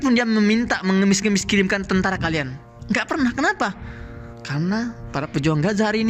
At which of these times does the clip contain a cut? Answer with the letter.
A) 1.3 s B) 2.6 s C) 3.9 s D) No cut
D